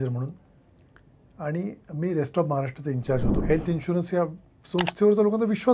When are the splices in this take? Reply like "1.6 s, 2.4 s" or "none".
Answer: 3.4 s